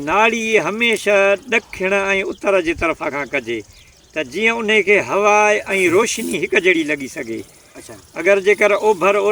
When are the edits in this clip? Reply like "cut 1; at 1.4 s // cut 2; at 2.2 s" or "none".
none